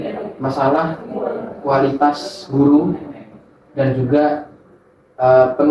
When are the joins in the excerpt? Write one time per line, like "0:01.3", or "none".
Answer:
none